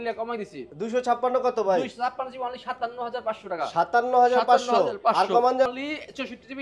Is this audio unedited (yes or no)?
no